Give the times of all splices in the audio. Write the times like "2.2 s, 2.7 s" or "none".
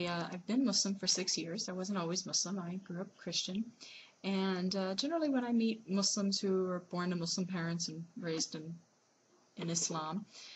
6.2 s